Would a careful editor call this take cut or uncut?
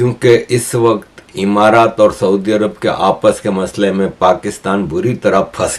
uncut